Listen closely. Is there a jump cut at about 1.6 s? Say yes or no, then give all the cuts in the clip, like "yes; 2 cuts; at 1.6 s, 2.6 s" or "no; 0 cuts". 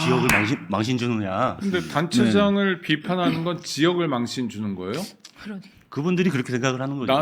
yes; 1 cut; at 1.6 s